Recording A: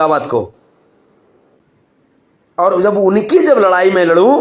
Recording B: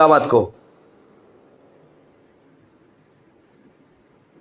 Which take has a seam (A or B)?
A